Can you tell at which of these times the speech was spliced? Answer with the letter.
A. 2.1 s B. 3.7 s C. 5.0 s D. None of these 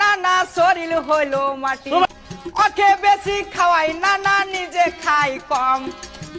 A